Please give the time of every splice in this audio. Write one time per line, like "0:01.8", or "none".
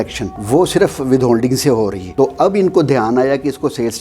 0:02.1